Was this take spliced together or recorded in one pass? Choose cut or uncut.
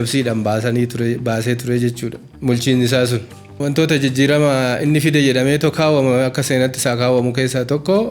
cut